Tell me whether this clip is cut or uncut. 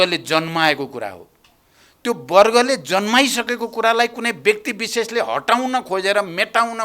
uncut